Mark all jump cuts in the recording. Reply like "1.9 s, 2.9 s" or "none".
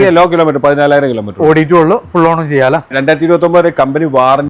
none

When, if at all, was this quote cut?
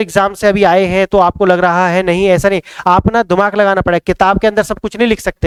none

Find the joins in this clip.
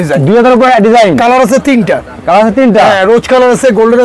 none

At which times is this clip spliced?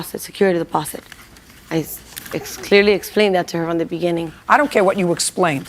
4.3 s

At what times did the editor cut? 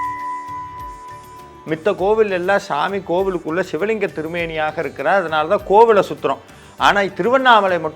1.5 s

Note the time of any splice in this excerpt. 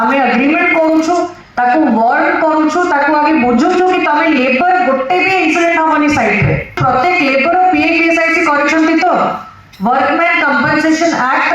6.8 s

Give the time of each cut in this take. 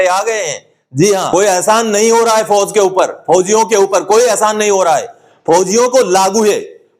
1.3 s

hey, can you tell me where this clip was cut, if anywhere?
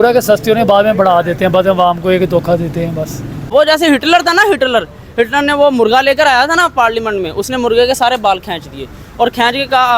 3.5 s

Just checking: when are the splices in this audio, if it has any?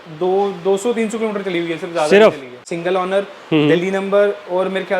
2.7 s

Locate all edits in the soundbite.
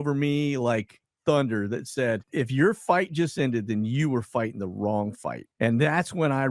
2.3 s

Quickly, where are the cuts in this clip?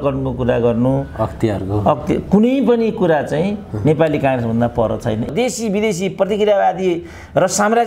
5.3 s

